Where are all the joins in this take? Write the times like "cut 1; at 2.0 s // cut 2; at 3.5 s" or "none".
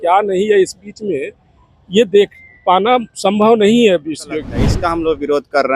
cut 1; at 4.6 s